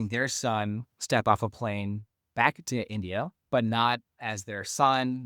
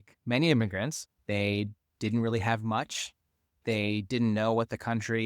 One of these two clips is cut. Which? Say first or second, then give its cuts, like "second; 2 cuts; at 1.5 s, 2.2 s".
second; 1 cut; at 1.1 s